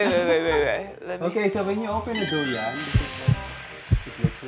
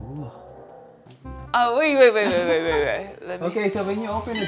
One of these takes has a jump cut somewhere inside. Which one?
second; 1 cut; at 1.0 s

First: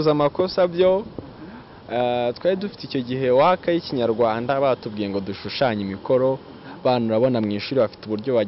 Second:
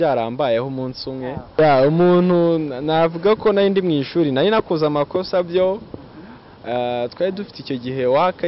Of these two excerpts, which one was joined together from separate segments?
second; 1 cut; at 1.5 s

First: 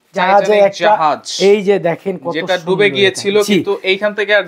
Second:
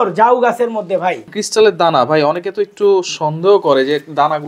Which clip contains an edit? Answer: second; 1 cut; at 1.3 s

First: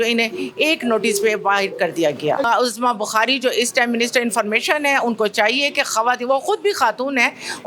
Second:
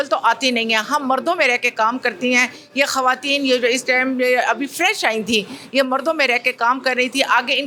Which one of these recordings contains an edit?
first; 1 cut; at 2.4 s

